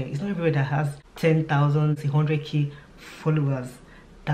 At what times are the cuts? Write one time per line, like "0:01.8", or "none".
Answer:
0:01.0
0:02.0